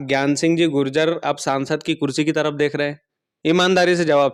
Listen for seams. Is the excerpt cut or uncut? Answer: uncut